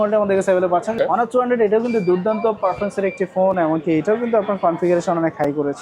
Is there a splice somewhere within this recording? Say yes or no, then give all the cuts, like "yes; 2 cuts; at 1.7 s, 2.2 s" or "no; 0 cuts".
yes; 1 cut; at 1.0 s